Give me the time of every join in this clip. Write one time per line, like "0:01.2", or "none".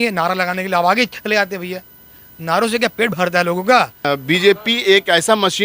0:04.0